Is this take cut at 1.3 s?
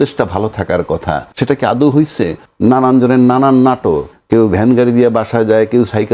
yes; 3 cuts; at 1.3 s, 2.4 s, 4.1 s

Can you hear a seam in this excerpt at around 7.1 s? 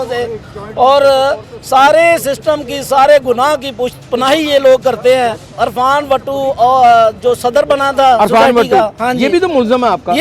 no; 1 cut; at 5.4 s

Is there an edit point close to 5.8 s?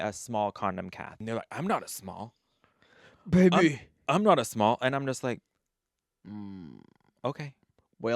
no; 1 cut; at 1.2 s

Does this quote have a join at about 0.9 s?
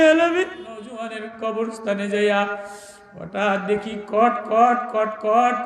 yes; 1 cut; at 0.9 s

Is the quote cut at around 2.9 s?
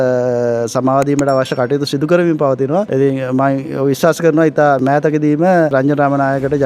yes; 3 cuts; at 2.9 s, 4.8 s, 5.7 s

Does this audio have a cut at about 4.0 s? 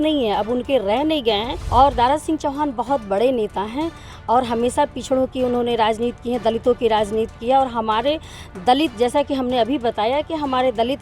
no; 1 cut; at 1.6 s

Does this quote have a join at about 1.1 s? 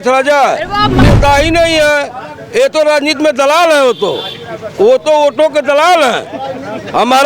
yes; 1 cut; at 1.1 s

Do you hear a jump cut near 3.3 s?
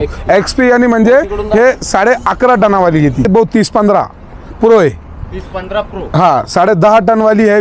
yes; 1 cut; at 3.3 s

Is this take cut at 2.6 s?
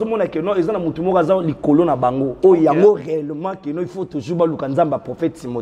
no; 0 cuts

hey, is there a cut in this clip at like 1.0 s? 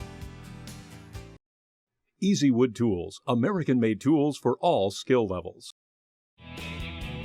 yes; 1 cut; at 1.0 s

